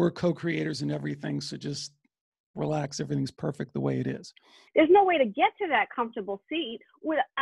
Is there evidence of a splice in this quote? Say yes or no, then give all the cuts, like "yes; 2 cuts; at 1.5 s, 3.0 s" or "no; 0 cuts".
yes; 1 cut; at 4.5 s